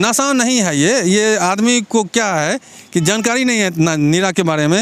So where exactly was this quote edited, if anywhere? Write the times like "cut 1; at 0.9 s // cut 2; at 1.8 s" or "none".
none